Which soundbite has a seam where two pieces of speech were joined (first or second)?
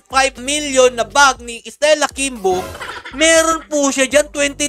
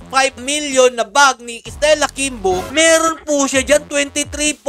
second